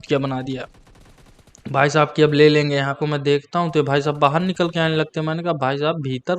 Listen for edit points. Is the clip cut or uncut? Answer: cut